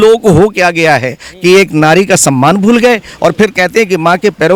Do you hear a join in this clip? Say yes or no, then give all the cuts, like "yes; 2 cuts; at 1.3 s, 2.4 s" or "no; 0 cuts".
no; 0 cuts